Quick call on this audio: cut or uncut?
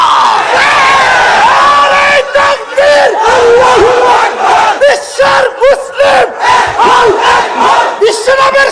uncut